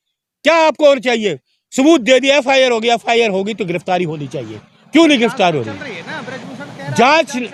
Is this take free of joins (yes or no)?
yes